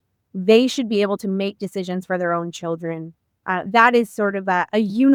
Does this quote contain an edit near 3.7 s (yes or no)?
no